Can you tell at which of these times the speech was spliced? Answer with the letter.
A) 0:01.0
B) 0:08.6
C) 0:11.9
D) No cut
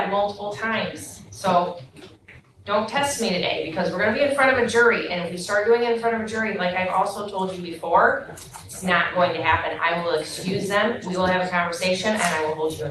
D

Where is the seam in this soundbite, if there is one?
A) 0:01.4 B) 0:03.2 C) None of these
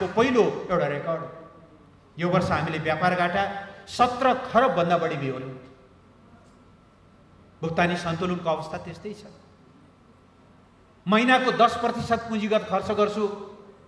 A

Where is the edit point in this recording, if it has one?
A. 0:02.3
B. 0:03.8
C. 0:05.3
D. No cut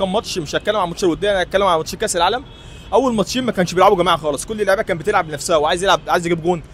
D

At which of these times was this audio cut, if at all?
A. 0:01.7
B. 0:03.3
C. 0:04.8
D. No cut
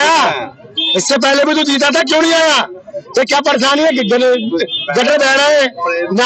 D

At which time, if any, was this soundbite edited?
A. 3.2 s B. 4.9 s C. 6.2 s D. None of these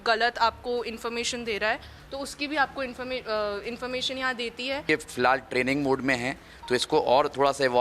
B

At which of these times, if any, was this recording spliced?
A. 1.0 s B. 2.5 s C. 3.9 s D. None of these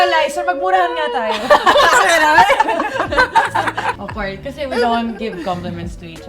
C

